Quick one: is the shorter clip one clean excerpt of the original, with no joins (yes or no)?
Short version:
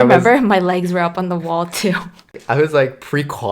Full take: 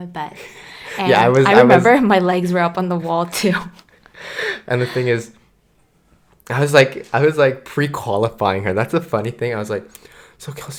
no